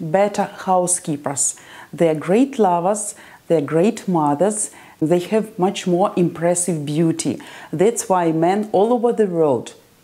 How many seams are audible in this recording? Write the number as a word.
one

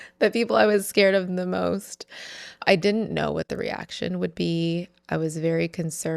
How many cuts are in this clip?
one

